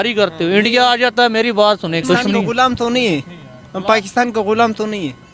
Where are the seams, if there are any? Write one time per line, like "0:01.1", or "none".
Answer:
0:02.0